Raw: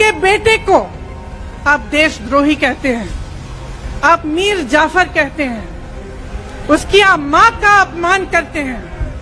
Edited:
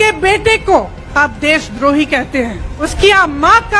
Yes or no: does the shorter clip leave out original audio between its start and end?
yes